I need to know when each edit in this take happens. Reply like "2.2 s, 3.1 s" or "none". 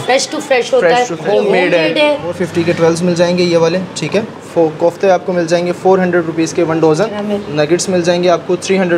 1.2 s, 2.4 s, 4.4 s, 7.2 s